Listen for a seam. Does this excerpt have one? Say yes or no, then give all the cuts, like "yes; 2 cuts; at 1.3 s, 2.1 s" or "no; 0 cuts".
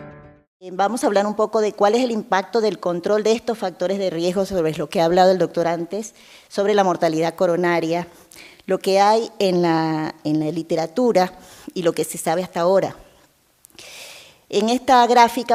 no; 0 cuts